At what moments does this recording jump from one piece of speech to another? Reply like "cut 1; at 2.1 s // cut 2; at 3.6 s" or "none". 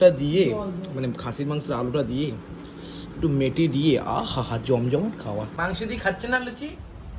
cut 1; at 5.6 s